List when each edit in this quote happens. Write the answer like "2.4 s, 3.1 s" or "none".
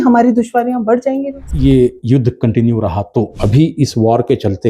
1.4 s, 3.3 s